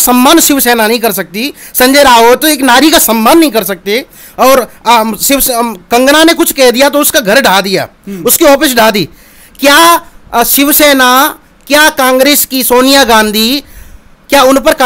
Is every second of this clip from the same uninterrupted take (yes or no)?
yes